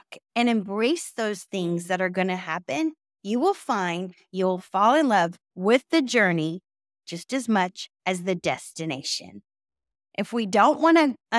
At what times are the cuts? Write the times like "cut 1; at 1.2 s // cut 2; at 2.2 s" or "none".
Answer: cut 1; at 10.0 s